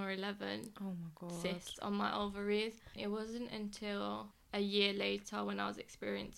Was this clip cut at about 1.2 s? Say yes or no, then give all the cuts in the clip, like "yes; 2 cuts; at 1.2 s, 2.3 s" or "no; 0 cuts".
no; 2 cuts; at 2.8 s, 4.3 s